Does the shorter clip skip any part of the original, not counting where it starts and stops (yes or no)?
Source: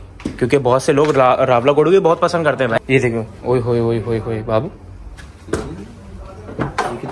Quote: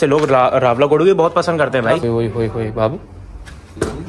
yes